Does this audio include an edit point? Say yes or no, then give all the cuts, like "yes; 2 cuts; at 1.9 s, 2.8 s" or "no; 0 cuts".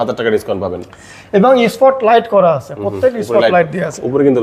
no; 0 cuts